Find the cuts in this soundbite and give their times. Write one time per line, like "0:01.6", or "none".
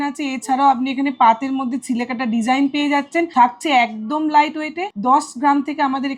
0:03.3
0:04.9